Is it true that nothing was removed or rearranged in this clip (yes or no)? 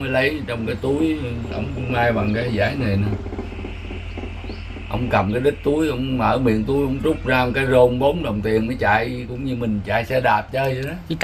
yes